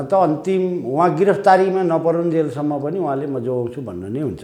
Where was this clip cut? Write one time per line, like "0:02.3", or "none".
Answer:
none